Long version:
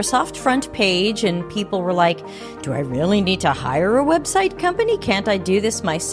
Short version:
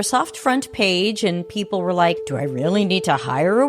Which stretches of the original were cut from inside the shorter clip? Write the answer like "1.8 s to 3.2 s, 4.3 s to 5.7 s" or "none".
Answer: 2.3 s to 2.7 s